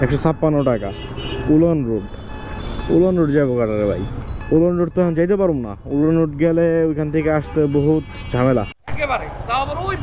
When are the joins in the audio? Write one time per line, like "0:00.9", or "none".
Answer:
none